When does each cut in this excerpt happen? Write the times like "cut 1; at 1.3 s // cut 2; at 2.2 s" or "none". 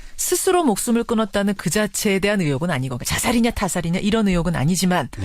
cut 1; at 2.6 s